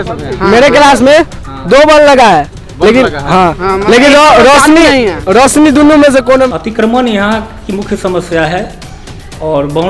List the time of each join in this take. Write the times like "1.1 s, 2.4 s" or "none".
6.5 s

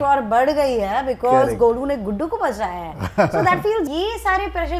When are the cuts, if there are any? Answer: 3.9 s

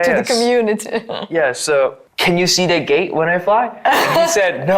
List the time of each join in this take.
2.1 s

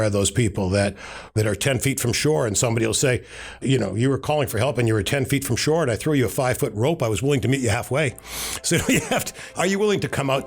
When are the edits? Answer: 1.2 s, 3.6 s, 9.5 s

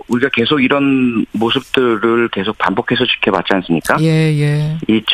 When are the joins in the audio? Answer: 2.6 s

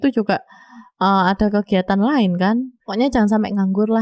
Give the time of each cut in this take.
2.8 s

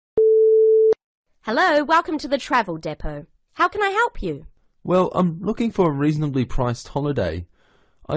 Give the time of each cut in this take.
0.9 s

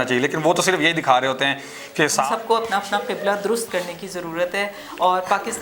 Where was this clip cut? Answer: 2.3 s

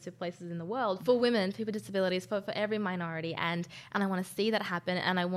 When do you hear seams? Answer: 1.0 s

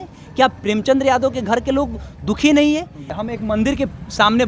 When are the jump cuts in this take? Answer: 3.1 s

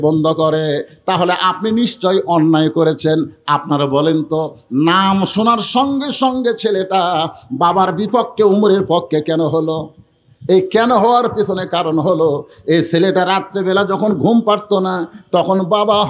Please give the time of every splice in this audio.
none

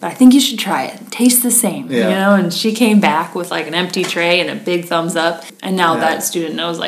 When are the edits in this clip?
5.5 s

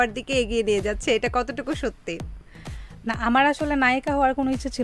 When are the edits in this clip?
none

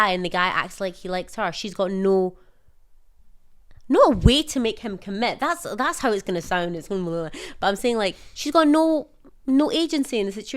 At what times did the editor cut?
none

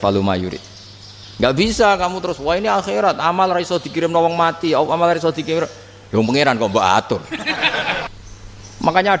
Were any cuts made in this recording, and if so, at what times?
8.1 s

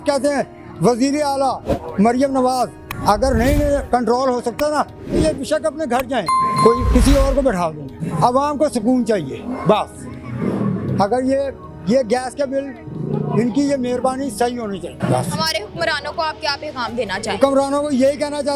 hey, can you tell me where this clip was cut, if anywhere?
none

